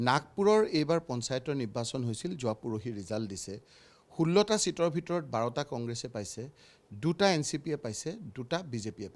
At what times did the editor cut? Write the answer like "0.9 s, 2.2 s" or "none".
none